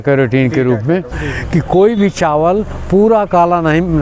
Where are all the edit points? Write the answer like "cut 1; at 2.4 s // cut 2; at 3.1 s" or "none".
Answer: cut 1; at 1.2 s